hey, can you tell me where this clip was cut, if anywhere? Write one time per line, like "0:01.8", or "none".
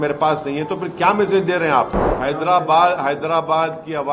0:02.0